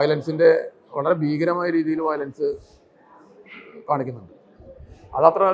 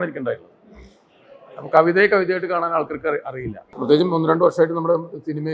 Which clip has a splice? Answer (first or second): second